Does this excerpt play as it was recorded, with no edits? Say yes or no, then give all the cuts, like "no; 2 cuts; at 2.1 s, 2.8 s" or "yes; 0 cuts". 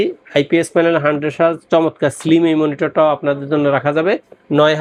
yes; 0 cuts